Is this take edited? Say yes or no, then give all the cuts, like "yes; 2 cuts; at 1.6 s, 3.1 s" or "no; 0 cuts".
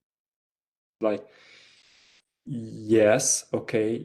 yes; 1 cut; at 0.9 s